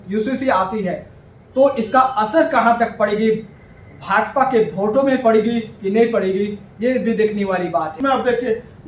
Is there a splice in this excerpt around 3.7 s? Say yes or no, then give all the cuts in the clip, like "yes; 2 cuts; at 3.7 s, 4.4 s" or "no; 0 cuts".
no; 1 cut; at 8.0 s